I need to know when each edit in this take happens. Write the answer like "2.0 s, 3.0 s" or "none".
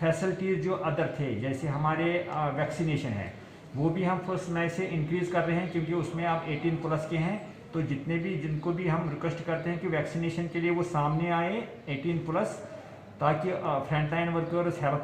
4.6 s